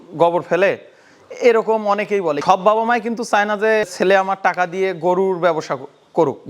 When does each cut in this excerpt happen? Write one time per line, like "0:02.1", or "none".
0:02.4
0:03.9